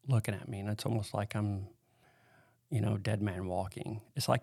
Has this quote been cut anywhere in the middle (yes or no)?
no